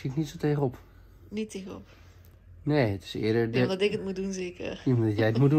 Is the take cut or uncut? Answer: uncut